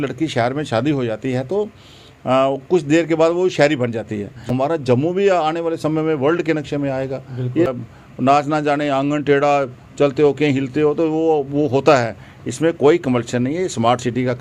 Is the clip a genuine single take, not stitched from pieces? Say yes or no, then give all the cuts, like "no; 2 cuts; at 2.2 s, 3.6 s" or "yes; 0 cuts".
no; 2 cuts; at 4.4 s, 7.7 s